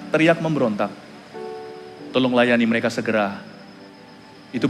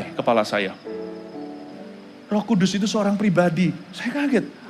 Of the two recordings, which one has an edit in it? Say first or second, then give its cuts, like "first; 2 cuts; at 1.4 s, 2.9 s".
second; 1 cut; at 1.7 s